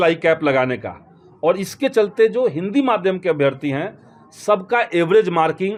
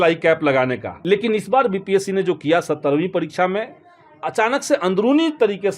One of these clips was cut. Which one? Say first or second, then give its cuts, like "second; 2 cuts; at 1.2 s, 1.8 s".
second; 1 cut; at 0.9 s